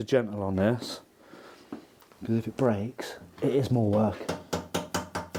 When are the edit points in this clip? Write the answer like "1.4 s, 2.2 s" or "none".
none